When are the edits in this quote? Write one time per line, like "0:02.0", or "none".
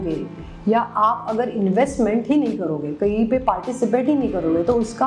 none